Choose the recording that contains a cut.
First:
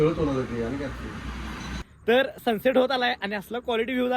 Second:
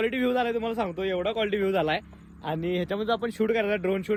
first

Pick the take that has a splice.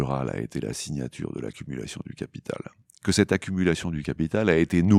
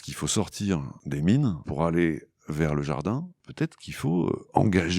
second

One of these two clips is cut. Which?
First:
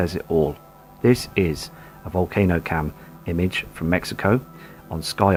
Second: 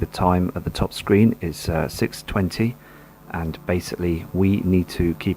second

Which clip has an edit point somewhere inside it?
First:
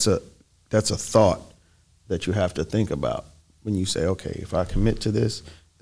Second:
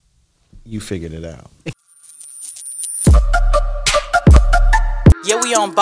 second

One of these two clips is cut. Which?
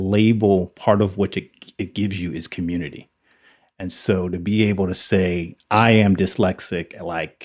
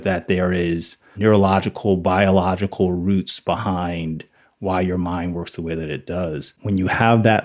second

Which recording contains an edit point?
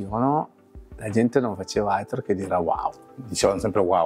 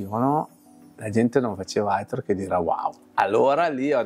second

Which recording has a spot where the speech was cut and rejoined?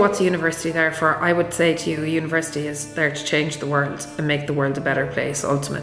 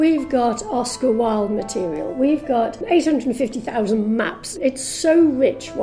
second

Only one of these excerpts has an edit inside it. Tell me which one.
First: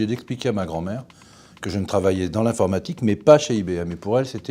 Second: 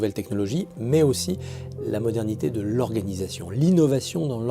second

